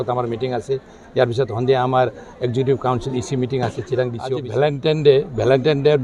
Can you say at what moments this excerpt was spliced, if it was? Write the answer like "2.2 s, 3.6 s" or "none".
4.4 s